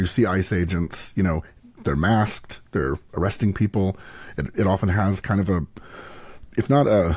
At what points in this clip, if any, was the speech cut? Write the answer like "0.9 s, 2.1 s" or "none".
none